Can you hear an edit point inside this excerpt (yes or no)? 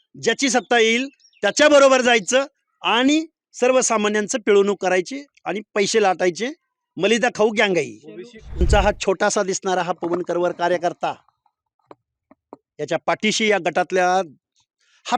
yes